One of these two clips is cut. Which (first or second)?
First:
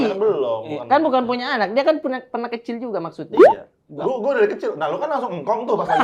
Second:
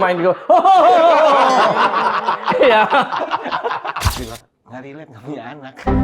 second